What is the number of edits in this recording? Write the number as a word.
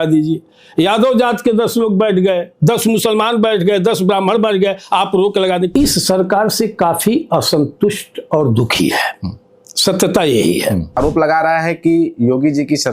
two